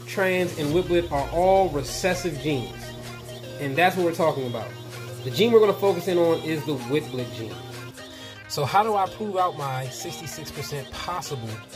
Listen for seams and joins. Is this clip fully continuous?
no; 2 cuts; at 5.0 s, 7.9 s

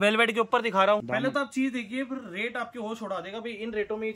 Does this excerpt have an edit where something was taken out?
yes; 1 cut; at 1.0 s

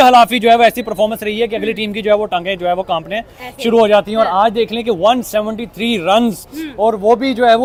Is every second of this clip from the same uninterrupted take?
yes; 0 cuts

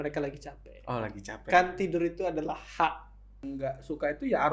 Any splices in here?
yes; 1 cut; at 3.5 s

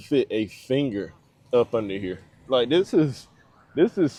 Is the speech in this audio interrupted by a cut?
no; 0 cuts

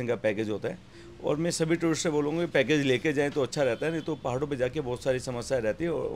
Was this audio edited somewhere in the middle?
no; 0 cuts

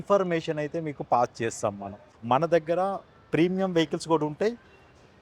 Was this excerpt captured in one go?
no; 1 cut; at 2.1 s

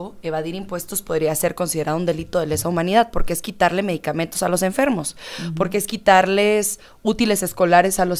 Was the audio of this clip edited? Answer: no; 0 cuts

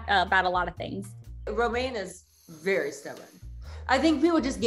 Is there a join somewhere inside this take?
yes; 1 cut; at 1.5 s

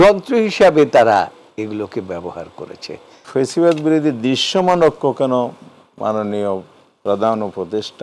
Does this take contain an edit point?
yes; 1 cut; at 3.2 s

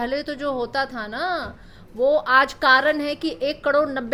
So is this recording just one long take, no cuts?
yes; 0 cuts

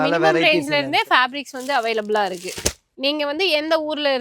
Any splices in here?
yes; 1 cut; at 2.9 s

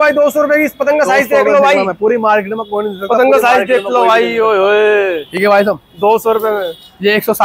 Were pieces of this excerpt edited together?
no; 0 cuts

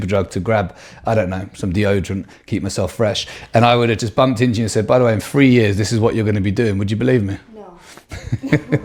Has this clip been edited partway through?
no; 0 cuts

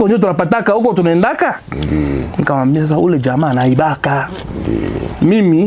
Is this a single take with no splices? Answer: yes; 0 cuts

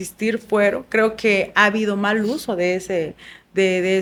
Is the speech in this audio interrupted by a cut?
no; 0 cuts

